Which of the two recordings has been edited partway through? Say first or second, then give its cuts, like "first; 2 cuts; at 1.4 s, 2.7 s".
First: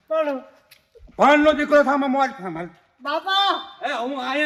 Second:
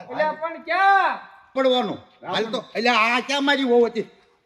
second; 1 cut; at 1.5 s